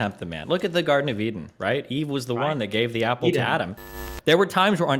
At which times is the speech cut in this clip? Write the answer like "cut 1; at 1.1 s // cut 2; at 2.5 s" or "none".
cut 1; at 4.0 s